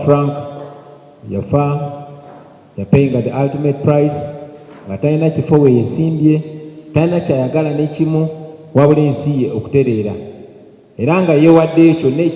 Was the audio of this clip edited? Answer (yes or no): no